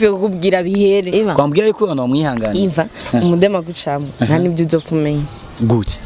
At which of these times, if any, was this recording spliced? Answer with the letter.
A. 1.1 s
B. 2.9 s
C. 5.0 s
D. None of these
A